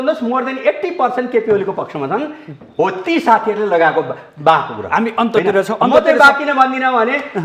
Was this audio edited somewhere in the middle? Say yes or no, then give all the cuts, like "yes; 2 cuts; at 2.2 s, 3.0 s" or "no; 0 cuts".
no; 0 cuts